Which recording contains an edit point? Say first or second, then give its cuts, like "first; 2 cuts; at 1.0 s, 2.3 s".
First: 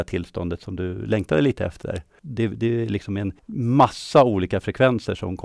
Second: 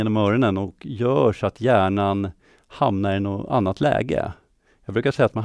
first; 2 cuts; at 2.2 s, 3.4 s